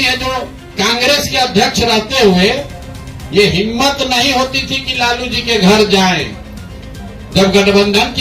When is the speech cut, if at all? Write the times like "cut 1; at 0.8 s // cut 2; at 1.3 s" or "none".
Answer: none